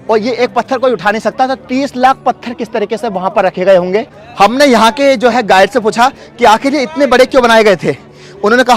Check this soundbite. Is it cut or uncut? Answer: uncut